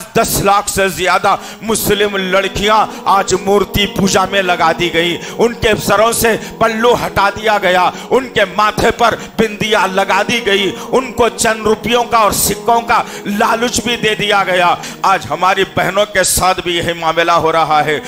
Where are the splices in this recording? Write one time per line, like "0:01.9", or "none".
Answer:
0:14.9